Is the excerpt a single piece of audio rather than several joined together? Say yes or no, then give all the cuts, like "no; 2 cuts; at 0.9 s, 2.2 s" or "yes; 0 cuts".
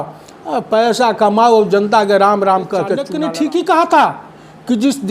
no; 1 cut; at 3.1 s